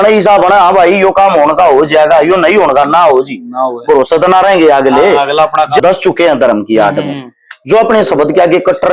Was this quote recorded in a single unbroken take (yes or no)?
no